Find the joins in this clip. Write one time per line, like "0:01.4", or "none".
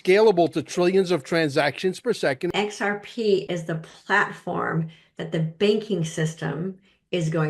0:02.5